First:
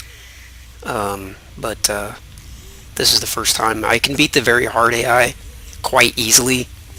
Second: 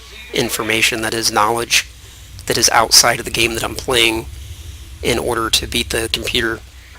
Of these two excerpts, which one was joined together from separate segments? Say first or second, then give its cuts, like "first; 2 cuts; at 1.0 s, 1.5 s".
second; 1 cut; at 2.6 s